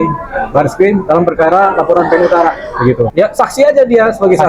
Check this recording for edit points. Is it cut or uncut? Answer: cut